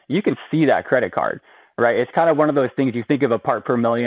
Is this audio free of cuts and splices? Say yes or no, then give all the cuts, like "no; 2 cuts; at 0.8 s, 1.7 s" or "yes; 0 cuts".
yes; 0 cuts